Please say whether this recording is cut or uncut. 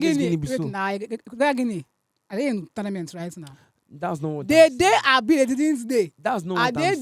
uncut